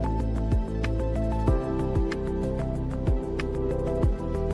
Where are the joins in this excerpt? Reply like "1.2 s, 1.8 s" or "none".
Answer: none

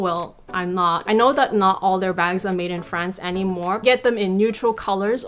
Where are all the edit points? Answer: 1.1 s, 3.8 s

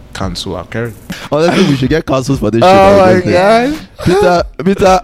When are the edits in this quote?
1.1 s

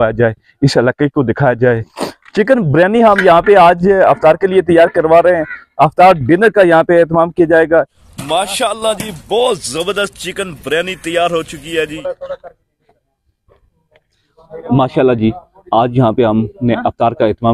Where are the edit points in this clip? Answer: 2.0 s, 8.0 s, 11.9 s

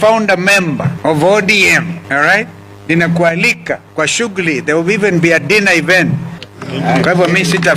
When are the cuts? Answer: 0.9 s, 2.0 s, 3.9 s, 6.4 s

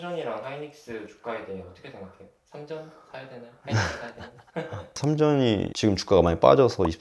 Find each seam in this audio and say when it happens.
5.0 s

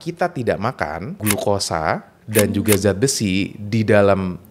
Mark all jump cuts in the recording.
1.2 s

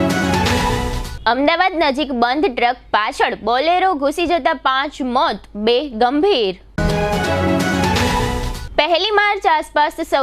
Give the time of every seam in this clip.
1.0 s

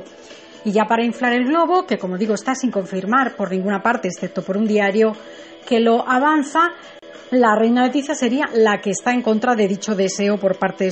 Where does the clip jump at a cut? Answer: 9.4 s

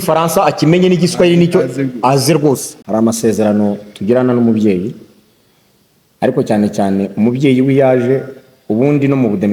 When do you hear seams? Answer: 2.7 s

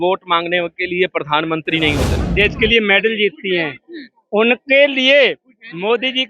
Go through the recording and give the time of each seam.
2.1 s

